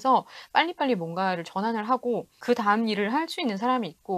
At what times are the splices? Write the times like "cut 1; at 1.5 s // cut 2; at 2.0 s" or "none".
cut 1; at 2.3 s